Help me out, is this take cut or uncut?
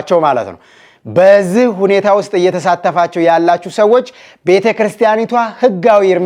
uncut